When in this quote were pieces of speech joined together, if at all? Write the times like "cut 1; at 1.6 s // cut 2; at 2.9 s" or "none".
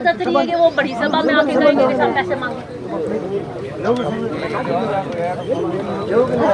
none